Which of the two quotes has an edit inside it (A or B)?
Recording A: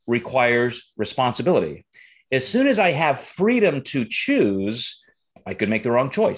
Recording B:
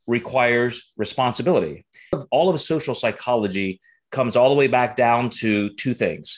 B